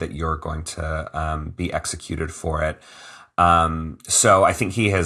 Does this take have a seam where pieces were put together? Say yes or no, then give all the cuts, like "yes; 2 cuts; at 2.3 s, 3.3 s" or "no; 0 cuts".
no; 0 cuts